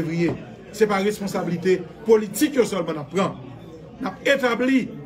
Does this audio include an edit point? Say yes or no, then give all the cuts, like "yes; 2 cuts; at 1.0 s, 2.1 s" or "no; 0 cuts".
no; 0 cuts